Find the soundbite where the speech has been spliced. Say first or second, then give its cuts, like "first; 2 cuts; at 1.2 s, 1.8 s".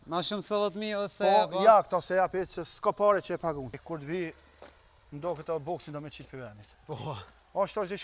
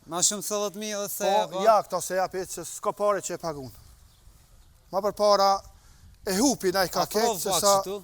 first; 1 cut; at 3.8 s